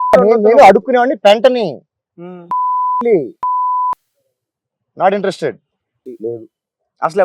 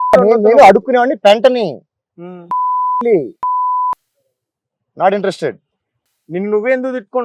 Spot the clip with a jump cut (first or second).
first